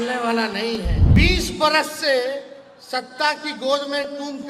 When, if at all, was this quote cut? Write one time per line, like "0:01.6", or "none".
0:01.0